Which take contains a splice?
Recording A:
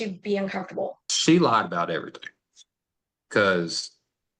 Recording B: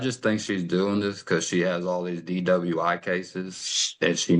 A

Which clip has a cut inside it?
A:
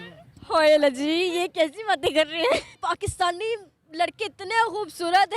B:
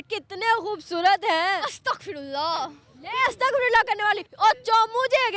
A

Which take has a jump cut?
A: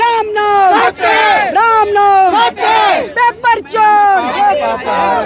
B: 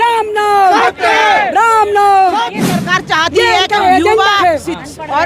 B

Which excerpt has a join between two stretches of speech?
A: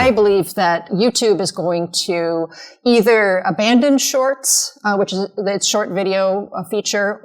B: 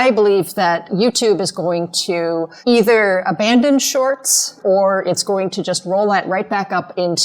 B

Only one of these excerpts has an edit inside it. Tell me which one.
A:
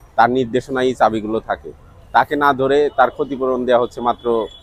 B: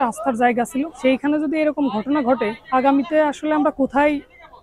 B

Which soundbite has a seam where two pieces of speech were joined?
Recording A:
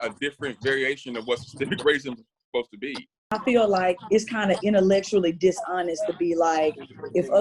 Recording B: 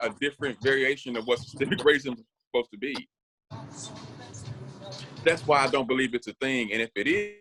A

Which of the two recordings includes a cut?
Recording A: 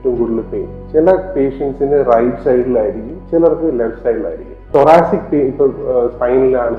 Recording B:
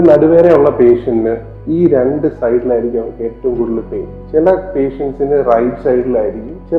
A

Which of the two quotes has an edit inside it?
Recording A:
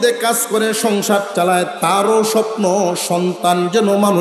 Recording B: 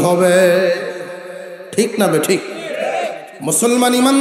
B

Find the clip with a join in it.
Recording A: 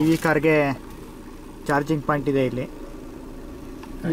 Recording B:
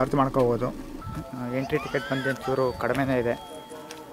B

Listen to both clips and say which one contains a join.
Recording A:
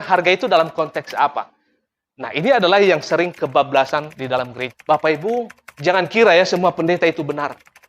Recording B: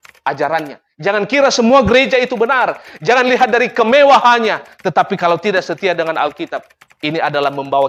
A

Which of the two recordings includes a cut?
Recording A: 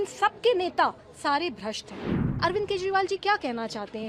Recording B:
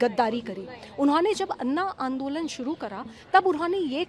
A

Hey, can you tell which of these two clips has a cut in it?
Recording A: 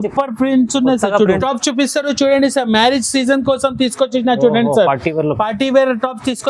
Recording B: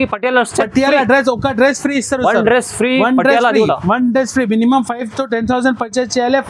A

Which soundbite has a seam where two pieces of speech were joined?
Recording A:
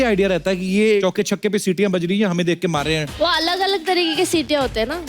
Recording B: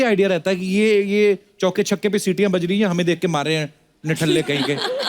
A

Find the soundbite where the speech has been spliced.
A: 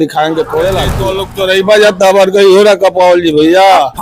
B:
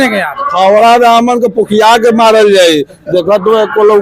A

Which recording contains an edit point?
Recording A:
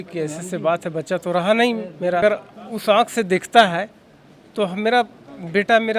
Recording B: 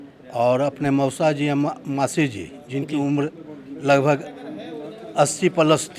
A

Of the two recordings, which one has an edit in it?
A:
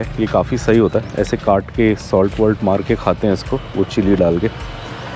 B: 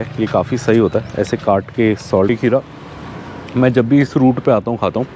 B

